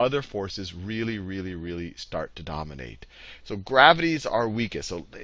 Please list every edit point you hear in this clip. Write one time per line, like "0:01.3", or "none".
0:02.0